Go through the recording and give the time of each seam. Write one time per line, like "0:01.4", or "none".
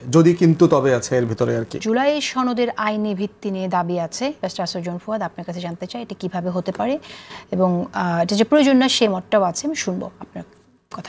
0:01.8